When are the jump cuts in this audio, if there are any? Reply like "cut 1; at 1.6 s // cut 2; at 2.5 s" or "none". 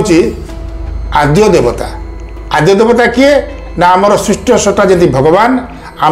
none